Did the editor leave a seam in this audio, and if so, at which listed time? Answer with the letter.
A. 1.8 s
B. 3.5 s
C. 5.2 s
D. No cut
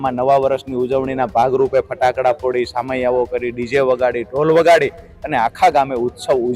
D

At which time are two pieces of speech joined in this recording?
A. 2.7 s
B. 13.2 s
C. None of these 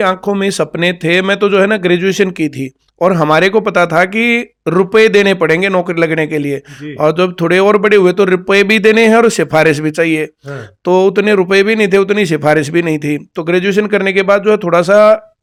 C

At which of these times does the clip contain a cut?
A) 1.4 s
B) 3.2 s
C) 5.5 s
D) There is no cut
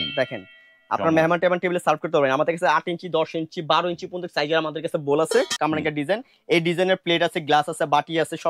C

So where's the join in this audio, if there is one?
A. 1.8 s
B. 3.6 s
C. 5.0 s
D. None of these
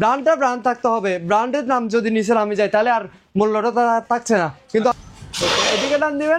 C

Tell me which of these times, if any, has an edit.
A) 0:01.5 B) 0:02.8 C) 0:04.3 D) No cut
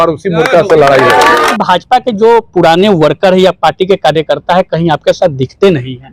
A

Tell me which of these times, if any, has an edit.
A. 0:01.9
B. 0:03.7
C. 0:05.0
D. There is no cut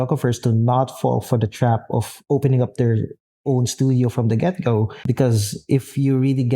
C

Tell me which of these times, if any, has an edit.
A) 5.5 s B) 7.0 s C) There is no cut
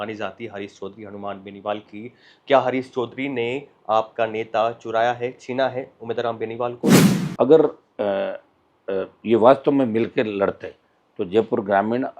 B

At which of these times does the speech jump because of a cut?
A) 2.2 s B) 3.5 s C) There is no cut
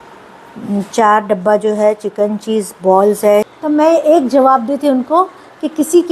B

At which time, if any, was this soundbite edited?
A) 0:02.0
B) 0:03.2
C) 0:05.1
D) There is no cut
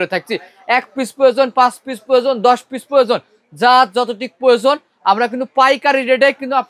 D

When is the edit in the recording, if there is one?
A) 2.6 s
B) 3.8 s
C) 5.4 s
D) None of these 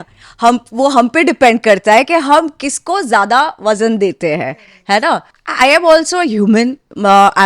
C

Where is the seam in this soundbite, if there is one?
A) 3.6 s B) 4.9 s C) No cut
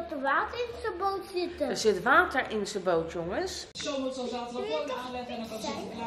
A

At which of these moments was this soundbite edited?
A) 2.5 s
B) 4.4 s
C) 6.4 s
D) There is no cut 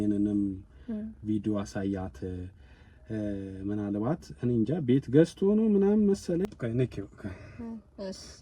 C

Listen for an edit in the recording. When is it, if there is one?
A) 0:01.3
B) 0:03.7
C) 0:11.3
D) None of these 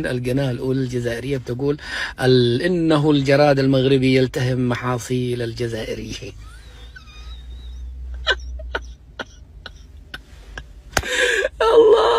D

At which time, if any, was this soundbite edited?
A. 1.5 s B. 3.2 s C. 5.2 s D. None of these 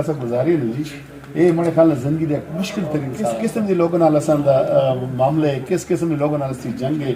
B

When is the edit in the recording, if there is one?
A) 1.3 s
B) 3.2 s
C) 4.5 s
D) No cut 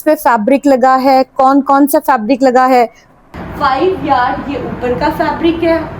B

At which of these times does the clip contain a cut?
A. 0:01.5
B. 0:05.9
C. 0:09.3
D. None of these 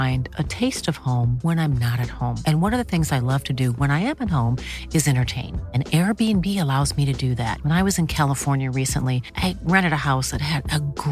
D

